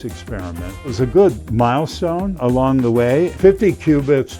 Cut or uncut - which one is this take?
cut